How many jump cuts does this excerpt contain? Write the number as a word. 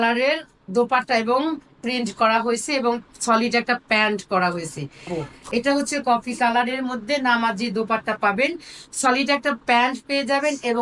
one